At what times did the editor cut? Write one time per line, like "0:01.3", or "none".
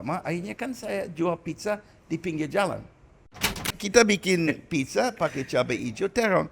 0:03.5